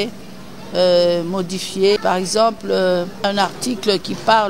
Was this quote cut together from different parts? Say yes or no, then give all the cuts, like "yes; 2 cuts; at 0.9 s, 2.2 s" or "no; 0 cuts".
yes; 2 cuts; at 2.0 s, 3.2 s